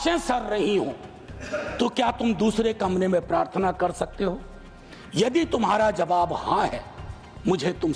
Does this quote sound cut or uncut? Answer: uncut